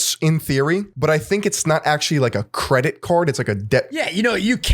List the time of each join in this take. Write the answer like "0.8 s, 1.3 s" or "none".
0.9 s